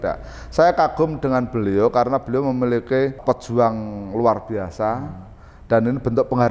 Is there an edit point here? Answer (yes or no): yes